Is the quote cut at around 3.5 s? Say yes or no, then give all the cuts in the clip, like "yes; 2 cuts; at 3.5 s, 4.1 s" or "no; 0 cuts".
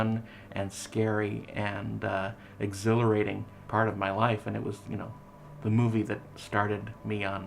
yes; 1 cut; at 3.5 s